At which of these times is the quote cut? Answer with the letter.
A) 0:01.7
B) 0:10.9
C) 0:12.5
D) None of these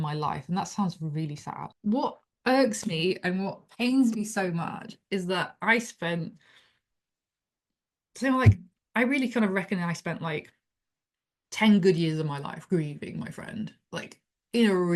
A